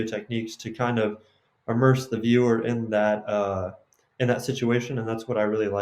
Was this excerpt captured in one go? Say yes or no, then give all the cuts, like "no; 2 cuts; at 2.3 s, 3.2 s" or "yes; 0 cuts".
yes; 0 cuts